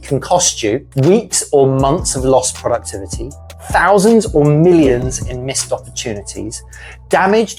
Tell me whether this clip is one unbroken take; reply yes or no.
yes